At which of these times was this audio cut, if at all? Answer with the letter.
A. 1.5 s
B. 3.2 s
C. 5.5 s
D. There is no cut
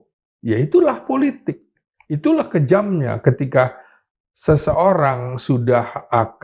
D